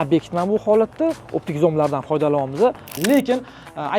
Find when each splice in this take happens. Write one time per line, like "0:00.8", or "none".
0:03.0